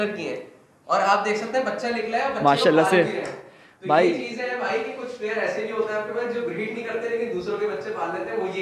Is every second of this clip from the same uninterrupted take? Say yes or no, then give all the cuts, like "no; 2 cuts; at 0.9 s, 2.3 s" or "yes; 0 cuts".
yes; 0 cuts